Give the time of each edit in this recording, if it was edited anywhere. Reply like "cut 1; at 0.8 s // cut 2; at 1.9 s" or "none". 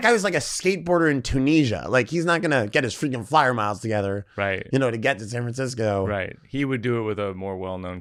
none